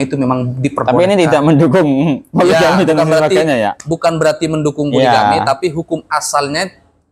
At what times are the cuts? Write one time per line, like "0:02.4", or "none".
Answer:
none